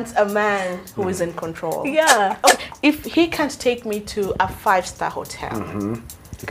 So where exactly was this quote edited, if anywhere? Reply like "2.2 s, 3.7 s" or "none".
2.4 s

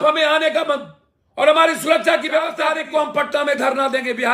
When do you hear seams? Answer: 2.6 s

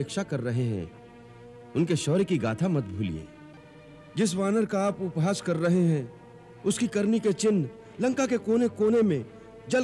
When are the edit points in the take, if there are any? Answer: 3.4 s

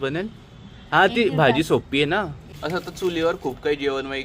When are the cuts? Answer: 2.4 s

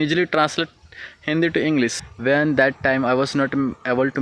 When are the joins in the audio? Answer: 1.9 s

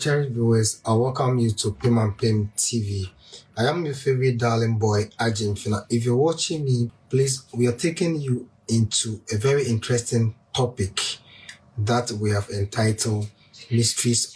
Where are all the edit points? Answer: 6.9 s

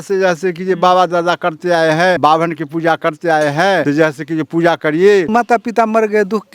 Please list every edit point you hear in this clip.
2.2 s, 3.8 s, 5.3 s

